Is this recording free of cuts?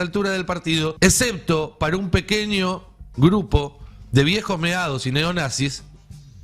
no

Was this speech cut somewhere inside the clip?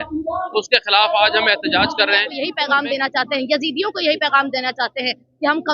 yes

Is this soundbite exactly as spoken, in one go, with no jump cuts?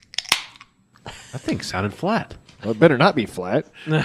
no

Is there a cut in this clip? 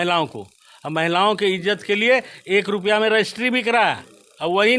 no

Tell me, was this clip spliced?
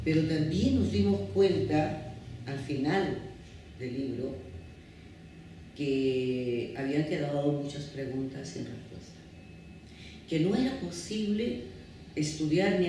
yes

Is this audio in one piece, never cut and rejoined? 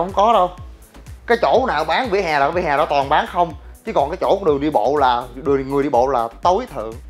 yes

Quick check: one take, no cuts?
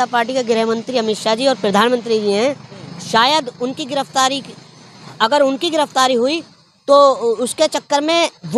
yes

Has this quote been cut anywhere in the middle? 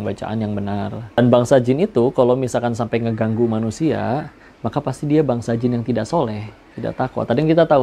yes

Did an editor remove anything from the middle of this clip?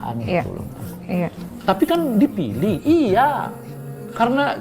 no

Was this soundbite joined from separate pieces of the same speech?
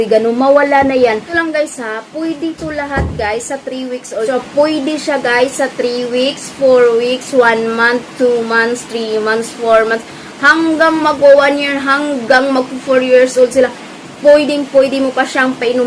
yes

